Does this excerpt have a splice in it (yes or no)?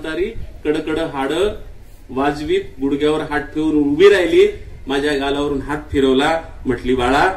no